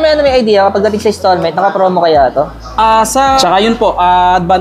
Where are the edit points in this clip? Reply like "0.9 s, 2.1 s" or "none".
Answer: 3.4 s